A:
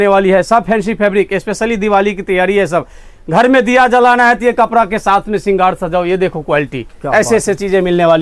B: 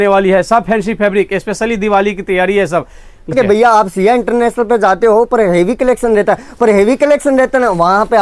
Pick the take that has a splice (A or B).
B